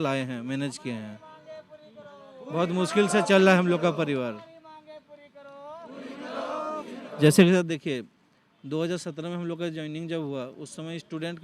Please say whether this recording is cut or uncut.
uncut